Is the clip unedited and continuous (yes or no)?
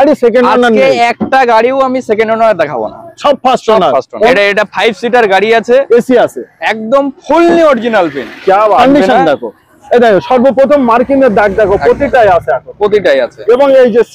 no